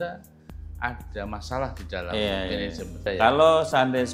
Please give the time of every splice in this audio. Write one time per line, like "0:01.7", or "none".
0:03.0